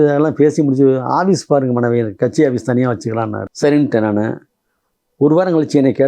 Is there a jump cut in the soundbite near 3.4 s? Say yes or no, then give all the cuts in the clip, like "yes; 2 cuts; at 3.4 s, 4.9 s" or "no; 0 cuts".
yes; 1 cut; at 3.4 s